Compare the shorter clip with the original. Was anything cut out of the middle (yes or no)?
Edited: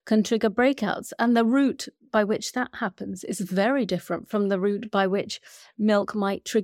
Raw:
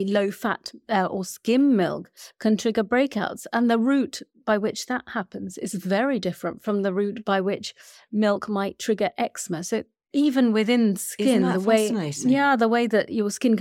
no